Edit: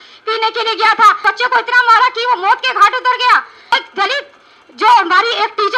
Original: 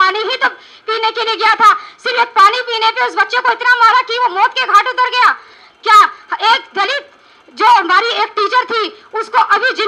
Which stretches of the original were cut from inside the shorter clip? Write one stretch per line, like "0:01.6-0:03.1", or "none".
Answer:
0:01.8-0:03.1
0:05.6-0:06.5